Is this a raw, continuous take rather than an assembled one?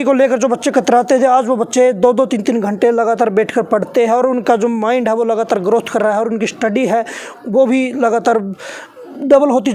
yes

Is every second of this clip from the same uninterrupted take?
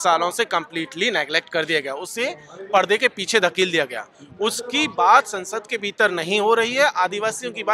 yes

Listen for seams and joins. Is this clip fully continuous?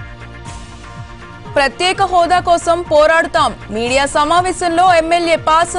no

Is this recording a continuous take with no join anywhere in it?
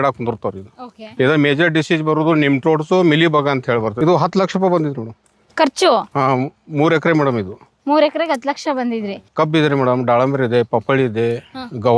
no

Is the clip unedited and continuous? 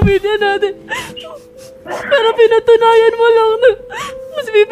yes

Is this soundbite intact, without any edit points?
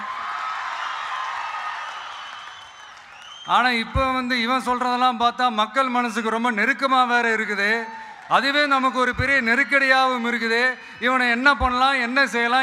yes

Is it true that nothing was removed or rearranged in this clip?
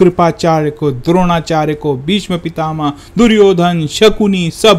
yes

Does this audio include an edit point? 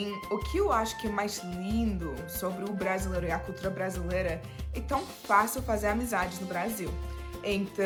no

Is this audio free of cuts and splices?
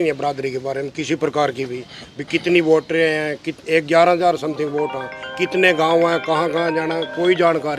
yes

